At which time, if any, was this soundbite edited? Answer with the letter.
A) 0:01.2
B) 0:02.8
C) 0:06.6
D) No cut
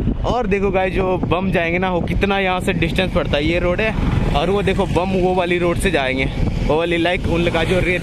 D